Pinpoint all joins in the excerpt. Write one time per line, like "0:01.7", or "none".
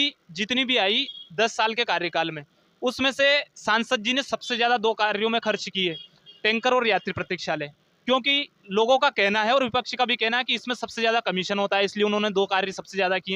none